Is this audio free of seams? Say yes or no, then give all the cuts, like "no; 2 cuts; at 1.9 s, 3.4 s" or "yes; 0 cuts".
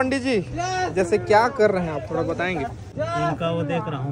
no; 1 cut; at 2.8 s